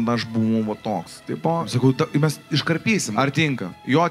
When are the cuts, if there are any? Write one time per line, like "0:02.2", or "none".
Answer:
0:01.7
0:03.1